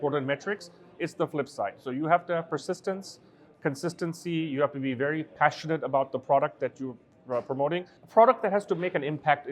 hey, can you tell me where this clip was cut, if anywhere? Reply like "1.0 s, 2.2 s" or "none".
8.0 s